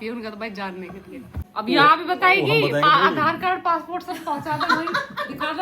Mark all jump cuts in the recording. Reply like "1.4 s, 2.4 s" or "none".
1.4 s